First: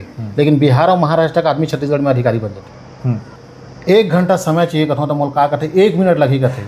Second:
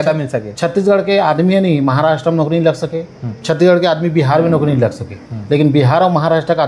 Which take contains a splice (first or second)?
first